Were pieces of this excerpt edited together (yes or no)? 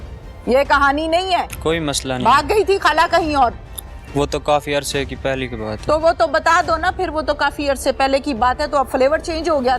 yes